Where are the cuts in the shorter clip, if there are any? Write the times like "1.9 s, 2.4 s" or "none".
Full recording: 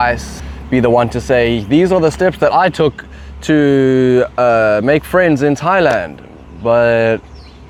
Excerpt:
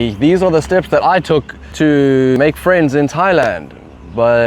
1.6 s, 2.3 s